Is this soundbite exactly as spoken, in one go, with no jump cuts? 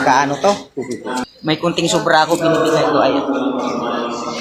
no; 1 cut; at 1.2 s

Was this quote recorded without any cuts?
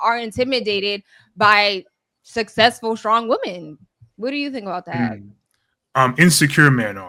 yes; 0 cuts

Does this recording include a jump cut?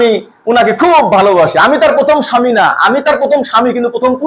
no; 0 cuts

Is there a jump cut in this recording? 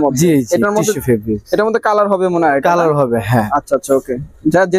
no; 0 cuts

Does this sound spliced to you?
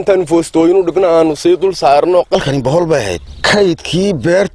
yes; 2 cuts; at 2.4 s, 3.3 s

